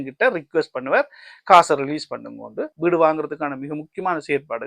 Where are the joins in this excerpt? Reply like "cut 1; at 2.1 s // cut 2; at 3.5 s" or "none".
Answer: cut 1; at 2.8 s